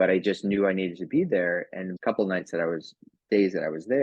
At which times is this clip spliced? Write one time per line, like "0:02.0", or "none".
0:01.8

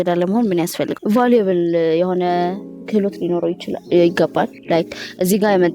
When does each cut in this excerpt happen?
0:01.0
0:04.6

